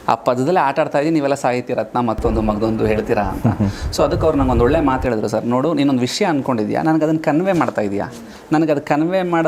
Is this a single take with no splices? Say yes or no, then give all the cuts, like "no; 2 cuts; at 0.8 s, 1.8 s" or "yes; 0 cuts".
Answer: yes; 0 cuts